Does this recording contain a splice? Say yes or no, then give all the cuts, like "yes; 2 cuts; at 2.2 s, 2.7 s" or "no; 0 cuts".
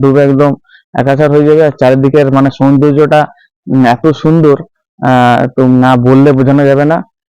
no; 0 cuts